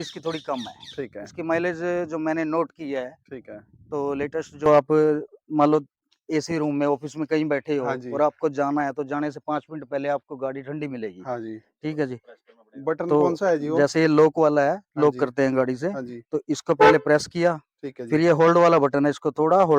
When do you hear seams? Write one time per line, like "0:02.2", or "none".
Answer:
0:04.7